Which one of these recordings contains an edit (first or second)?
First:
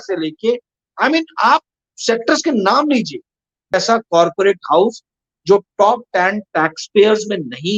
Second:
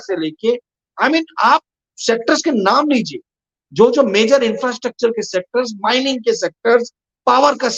first